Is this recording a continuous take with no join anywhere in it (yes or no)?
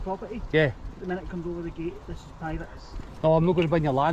yes